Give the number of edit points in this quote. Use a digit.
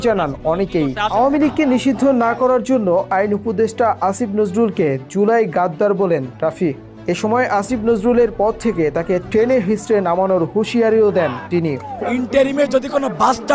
2